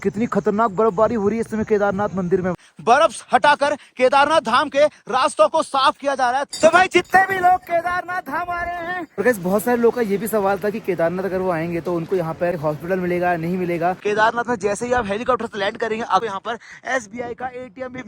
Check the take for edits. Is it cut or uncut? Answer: cut